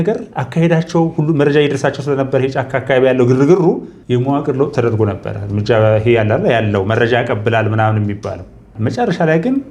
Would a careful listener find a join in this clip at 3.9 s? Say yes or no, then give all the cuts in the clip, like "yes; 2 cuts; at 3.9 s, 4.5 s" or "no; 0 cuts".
yes; 2 cuts; at 3.9 s, 8.7 s